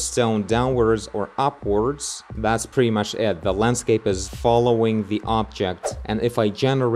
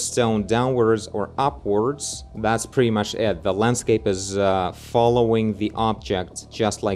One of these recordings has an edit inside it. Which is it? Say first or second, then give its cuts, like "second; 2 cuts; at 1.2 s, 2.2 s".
first; 2 cuts; at 4.3 s, 5.9 s